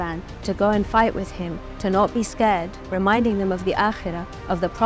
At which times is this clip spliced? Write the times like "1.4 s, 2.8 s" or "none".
2.8 s